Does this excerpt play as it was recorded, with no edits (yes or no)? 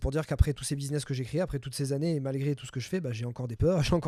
yes